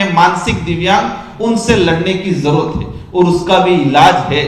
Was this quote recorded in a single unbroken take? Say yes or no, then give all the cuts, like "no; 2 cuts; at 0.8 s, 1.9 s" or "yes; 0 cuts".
yes; 0 cuts